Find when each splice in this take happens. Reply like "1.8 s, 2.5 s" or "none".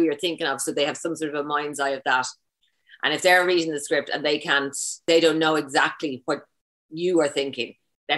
5.0 s